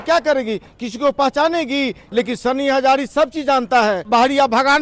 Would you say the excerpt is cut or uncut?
cut